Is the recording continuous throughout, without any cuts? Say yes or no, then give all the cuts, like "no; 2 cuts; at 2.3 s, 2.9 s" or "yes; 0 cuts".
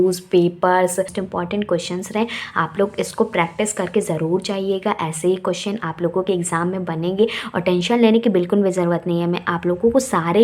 no; 1 cut; at 1.2 s